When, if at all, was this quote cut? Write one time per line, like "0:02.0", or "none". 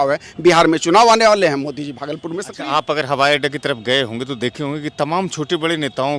0:02.5